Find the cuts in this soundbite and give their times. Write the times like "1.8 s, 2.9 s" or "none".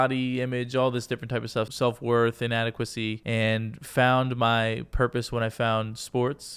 1.7 s, 3.2 s